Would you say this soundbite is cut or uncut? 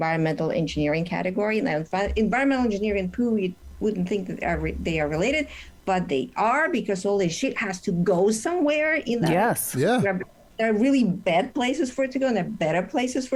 uncut